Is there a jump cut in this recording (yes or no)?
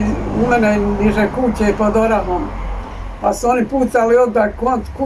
no